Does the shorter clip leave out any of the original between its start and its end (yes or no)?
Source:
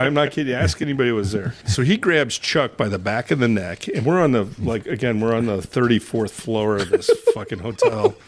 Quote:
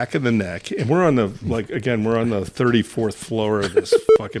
no